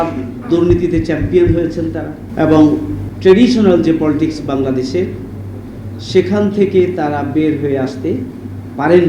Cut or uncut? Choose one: cut